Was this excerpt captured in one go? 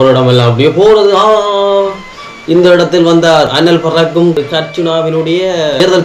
no; 1 cut; at 4.4 s

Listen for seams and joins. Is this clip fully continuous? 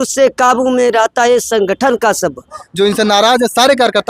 no; 1 cut; at 2.6 s

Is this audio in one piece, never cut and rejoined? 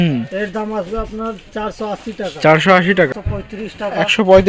no; 1 cut; at 3.2 s

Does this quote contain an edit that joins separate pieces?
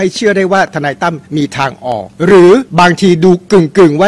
yes; 3 cuts; at 1.2 s, 2.1 s, 2.7 s

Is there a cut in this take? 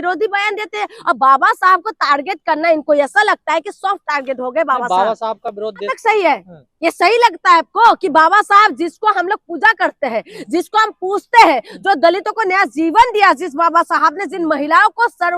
yes; 1 cut; at 5.9 s

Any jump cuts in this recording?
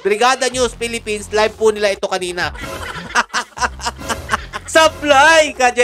yes; 2 cuts; at 2.4 s, 4.6 s

